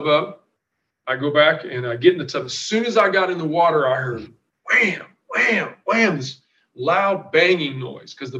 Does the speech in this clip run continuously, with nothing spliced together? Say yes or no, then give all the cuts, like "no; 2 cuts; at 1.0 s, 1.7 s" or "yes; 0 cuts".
yes; 0 cuts